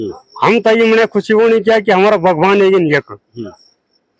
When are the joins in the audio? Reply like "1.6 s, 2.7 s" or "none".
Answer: none